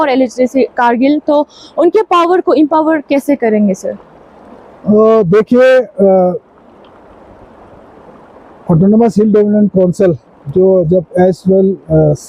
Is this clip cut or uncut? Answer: uncut